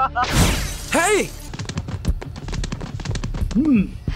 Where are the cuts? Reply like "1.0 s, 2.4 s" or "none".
1.5 s